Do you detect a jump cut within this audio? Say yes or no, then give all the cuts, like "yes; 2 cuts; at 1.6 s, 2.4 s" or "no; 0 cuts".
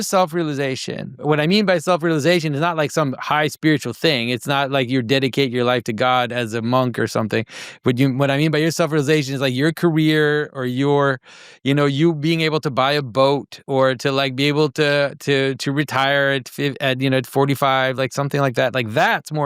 yes; 1 cut; at 1.2 s